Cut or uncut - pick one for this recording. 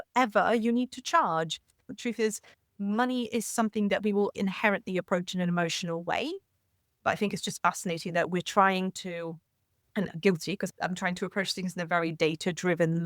cut